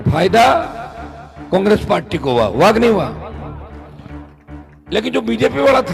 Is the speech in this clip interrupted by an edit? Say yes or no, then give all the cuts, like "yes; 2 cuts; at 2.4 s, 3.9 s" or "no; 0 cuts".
no; 0 cuts